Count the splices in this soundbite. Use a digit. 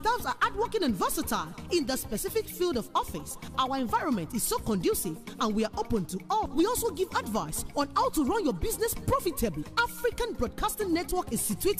0